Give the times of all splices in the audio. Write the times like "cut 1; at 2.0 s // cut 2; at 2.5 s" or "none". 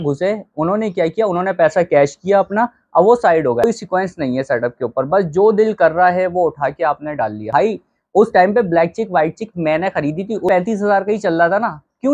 cut 1; at 3.6 s // cut 2; at 7.5 s // cut 3; at 10.5 s